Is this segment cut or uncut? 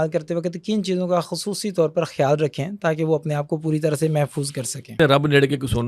cut